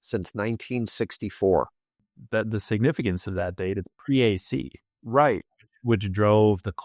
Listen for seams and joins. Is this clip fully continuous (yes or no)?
no